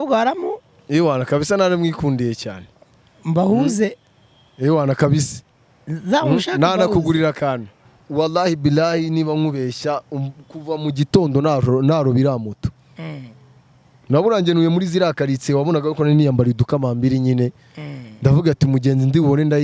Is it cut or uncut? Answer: cut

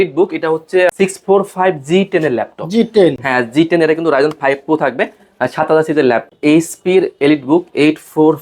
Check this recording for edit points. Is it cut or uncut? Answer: cut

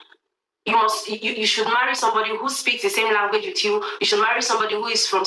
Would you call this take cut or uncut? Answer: uncut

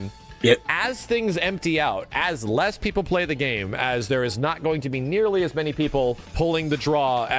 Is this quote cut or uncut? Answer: uncut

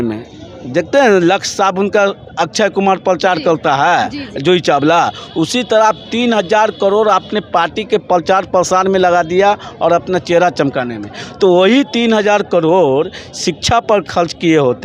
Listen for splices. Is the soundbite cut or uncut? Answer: uncut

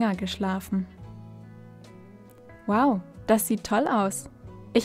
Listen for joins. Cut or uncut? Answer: uncut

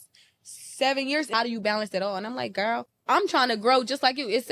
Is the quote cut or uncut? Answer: cut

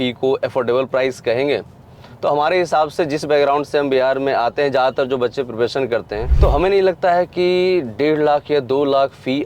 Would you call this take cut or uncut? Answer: cut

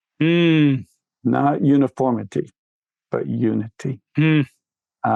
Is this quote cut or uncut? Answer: uncut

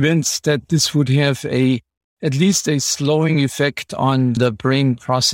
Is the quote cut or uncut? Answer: cut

